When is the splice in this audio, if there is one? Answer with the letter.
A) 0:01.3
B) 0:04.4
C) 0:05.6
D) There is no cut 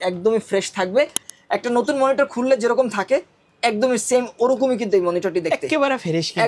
A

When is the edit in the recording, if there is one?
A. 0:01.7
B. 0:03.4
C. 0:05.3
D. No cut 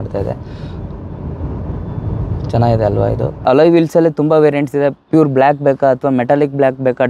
B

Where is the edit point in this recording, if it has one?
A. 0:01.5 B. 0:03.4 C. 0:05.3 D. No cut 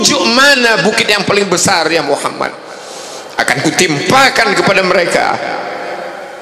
D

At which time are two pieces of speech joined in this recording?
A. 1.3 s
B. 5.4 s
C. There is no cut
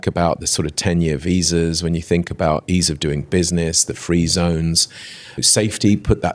B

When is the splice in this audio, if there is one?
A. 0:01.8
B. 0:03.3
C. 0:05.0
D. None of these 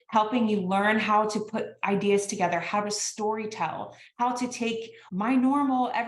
C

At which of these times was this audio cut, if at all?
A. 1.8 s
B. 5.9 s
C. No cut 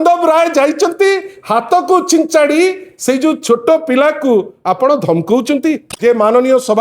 B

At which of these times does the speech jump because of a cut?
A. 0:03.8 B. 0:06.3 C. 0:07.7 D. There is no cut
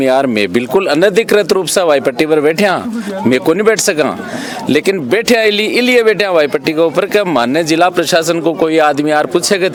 D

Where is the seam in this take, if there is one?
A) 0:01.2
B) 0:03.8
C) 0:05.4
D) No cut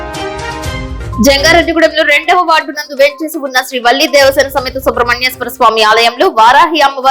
A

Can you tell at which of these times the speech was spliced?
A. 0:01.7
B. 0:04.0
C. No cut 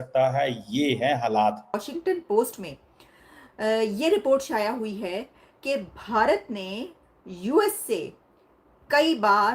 A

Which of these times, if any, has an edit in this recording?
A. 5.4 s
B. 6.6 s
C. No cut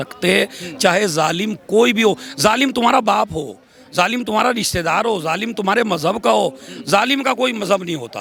C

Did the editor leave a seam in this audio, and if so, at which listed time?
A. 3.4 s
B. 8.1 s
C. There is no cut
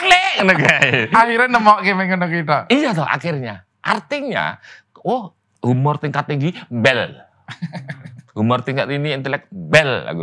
C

